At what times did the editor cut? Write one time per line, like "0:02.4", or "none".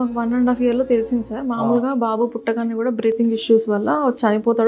none